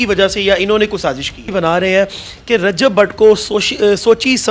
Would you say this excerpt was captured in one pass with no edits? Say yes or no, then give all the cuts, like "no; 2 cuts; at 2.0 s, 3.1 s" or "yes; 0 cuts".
no; 1 cut; at 1.5 s